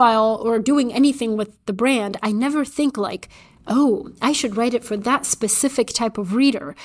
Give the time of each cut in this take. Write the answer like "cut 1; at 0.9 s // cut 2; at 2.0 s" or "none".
none

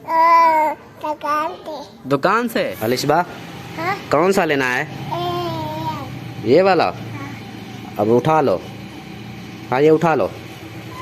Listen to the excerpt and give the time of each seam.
cut 1; at 2.7 s

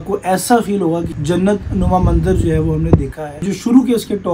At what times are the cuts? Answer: cut 1; at 1.1 s // cut 2; at 3.4 s

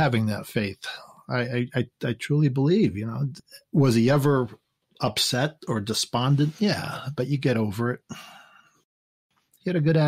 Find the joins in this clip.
cut 1; at 8.9 s

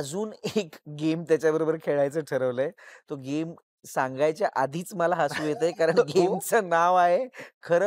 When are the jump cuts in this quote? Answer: none

